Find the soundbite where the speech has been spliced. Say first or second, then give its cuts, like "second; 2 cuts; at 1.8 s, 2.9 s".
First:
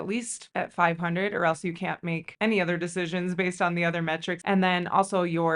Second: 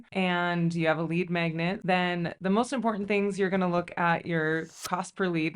first; 1 cut; at 4.4 s